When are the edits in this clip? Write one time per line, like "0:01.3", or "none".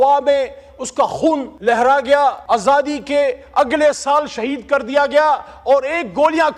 0:01.5
0:02.4